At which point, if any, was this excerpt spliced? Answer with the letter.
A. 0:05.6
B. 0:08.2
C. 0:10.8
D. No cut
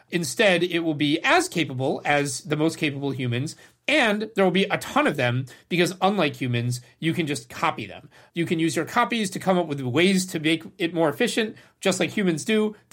B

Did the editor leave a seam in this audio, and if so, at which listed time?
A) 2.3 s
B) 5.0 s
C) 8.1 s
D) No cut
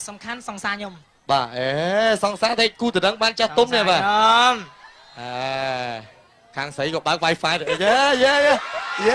C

